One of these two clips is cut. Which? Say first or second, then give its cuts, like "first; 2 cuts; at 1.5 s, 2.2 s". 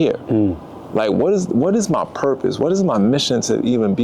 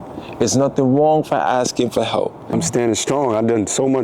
second; 1 cut; at 2.5 s